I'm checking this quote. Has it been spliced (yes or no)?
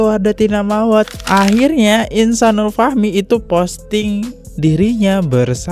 yes